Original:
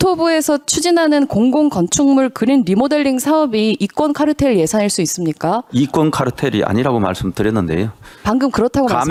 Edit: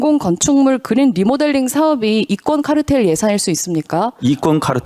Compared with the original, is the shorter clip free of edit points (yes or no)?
yes